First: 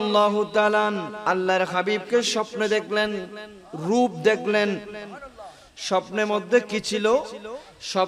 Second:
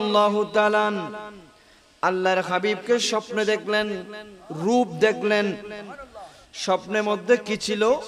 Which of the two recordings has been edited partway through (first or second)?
first